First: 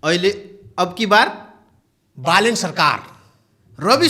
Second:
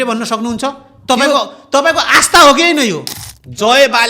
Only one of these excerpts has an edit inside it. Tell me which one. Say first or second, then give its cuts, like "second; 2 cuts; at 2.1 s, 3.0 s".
second; 1 cut; at 3.1 s